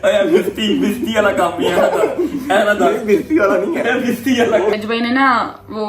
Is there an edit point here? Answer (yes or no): yes